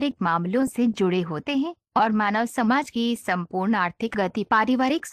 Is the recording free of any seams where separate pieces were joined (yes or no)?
no